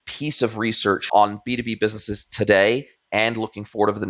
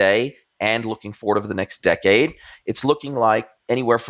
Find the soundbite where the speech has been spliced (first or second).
first